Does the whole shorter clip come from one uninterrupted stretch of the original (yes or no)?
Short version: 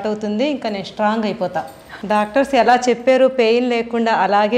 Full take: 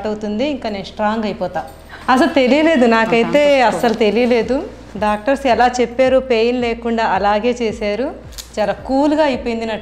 no